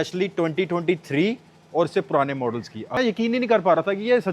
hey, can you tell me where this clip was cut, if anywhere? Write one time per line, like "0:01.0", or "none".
0:02.9